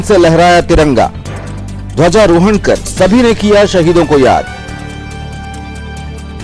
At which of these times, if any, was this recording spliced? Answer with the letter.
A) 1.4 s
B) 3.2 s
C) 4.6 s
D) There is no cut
D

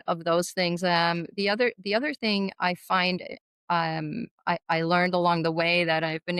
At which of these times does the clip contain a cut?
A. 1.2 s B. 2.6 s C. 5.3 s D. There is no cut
D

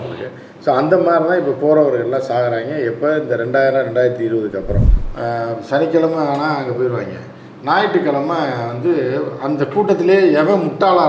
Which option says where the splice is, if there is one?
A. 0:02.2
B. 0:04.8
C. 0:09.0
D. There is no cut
B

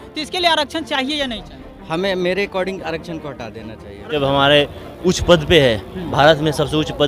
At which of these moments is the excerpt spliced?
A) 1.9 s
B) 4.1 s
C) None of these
B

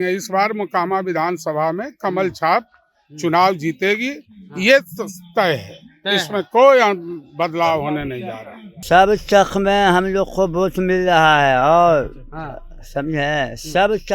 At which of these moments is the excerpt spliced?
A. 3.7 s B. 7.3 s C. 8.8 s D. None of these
C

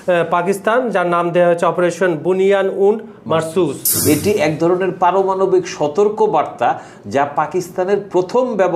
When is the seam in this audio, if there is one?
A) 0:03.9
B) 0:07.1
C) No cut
A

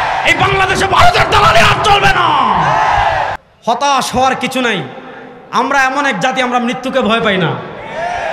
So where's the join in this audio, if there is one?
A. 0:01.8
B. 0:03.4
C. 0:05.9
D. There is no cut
B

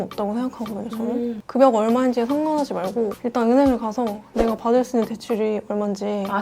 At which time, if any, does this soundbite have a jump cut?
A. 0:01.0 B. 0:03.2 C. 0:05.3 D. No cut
B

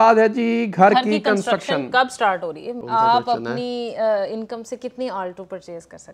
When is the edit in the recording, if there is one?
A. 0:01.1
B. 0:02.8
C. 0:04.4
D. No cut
B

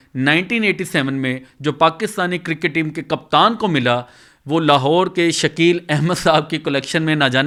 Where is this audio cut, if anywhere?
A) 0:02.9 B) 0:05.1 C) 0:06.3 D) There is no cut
D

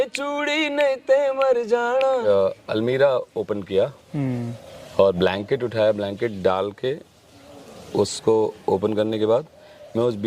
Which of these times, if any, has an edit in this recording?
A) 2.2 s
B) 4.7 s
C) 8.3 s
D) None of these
A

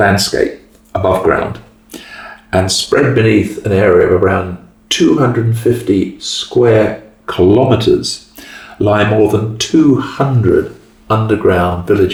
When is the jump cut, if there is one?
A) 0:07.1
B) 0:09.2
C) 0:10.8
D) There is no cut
D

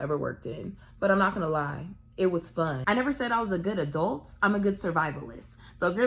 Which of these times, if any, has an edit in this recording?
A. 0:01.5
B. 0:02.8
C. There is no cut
B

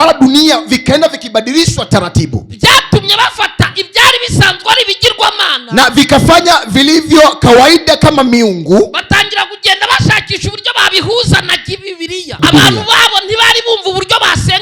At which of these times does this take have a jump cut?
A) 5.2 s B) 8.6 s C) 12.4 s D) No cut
C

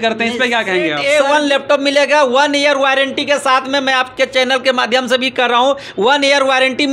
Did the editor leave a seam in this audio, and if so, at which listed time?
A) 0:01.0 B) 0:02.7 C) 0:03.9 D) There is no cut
A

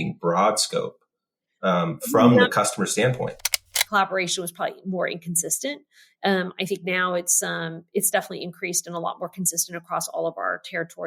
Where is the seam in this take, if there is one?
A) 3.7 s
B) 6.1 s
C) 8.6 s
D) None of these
A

